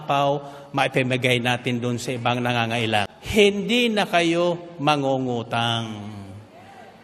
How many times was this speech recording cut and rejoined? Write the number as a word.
one